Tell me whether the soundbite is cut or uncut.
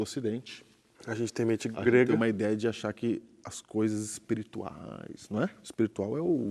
cut